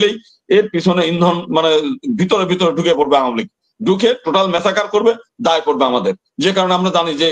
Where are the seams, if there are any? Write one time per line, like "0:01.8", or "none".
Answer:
none